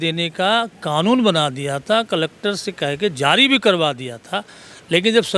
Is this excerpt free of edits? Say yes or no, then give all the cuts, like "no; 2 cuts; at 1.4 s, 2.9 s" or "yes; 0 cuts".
yes; 0 cuts